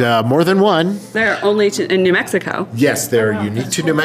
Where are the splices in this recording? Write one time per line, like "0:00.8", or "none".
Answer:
0:01.2